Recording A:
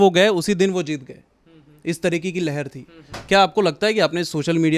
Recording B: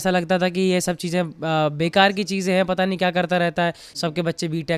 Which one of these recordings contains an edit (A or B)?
B